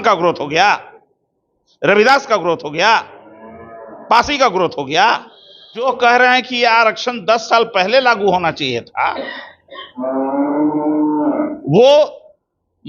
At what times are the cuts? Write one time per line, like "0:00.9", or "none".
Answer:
0:05.8

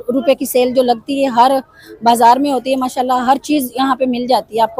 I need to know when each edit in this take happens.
none

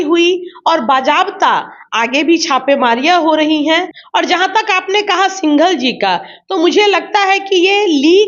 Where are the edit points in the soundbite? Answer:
0:04.0

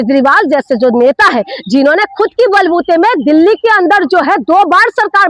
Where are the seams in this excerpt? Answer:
none

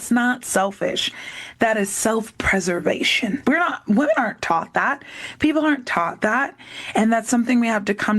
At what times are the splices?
0:03.4

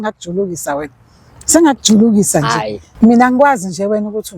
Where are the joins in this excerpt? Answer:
0:02.9

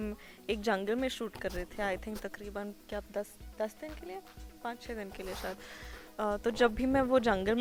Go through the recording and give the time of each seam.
none

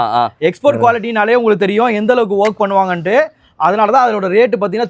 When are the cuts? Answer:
none

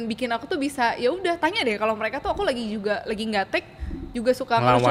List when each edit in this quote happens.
none

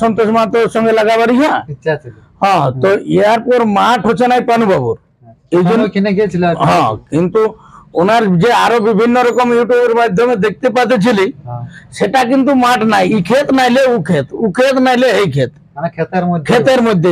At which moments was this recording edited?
none

